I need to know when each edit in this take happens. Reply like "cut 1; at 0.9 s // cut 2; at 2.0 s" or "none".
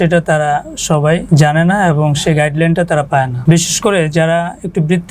cut 1; at 1.2 s // cut 2; at 3.3 s